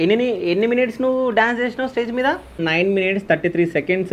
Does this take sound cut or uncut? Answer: cut